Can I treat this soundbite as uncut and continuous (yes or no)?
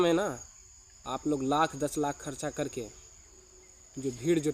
yes